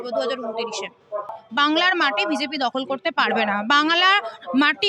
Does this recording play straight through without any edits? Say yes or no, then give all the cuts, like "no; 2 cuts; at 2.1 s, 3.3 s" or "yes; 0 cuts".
no; 1 cut; at 1.4 s